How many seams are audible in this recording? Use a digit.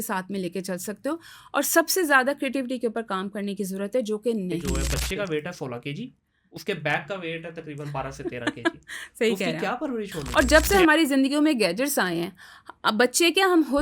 2